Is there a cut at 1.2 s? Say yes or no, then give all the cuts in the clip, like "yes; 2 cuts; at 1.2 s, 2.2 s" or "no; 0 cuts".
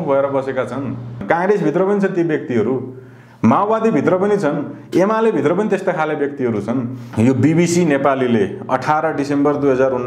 yes; 2 cuts; at 1.2 s, 7.0 s